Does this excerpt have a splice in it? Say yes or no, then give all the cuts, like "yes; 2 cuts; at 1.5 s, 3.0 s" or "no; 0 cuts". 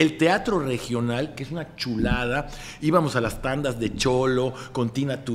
no; 0 cuts